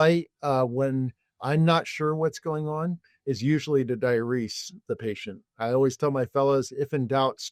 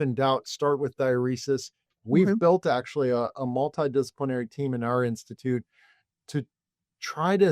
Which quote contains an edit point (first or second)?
second